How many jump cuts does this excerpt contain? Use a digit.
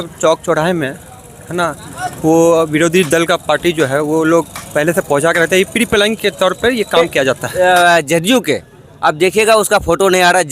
1